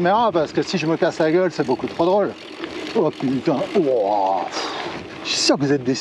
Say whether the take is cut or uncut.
uncut